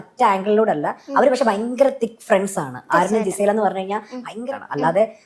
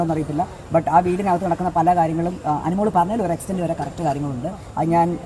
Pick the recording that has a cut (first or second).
first